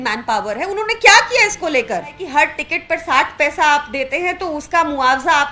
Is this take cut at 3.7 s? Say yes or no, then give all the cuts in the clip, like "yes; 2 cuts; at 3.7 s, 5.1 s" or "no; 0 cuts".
no; 1 cut; at 2.2 s